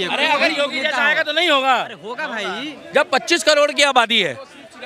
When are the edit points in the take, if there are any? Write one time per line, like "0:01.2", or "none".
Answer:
none